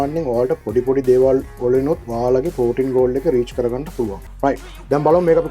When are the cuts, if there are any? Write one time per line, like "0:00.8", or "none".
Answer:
0:04.2